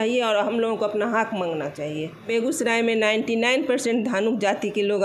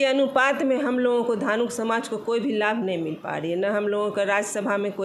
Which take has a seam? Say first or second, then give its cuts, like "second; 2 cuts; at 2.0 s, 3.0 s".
first; 1 cut; at 2.3 s